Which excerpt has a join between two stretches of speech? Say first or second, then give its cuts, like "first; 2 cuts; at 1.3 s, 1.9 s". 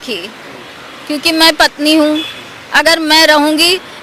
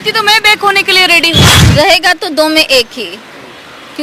second; 1 cut; at 1.5 s